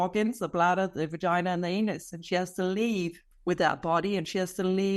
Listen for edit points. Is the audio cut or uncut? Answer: cut